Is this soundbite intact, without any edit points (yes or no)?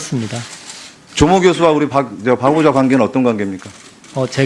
yes